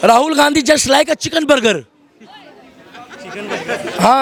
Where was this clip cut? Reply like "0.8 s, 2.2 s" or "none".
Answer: none